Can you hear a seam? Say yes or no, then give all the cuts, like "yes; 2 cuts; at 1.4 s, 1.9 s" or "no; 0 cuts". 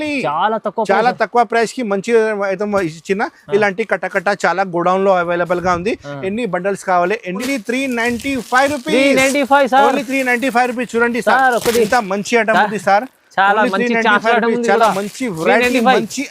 yes; 1 cut; at 7.4 s